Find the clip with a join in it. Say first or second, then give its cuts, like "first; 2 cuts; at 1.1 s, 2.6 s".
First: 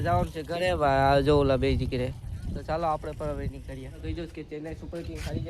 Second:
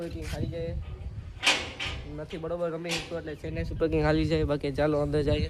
first; 1 cut; at 3.9 s